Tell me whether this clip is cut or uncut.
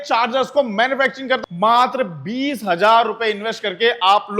cut